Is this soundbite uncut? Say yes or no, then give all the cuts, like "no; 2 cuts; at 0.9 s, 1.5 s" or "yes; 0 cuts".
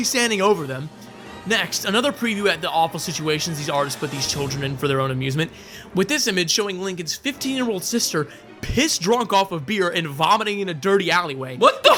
yes; 0 cuts